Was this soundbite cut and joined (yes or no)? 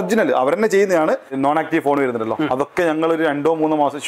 yes